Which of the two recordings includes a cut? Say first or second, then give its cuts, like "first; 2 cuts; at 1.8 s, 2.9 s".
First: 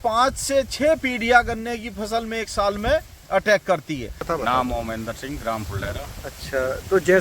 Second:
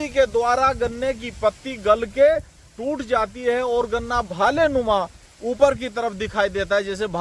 first; 1 cut; at 4.2 s